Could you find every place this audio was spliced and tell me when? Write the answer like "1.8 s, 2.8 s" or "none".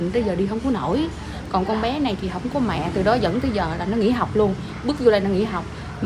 none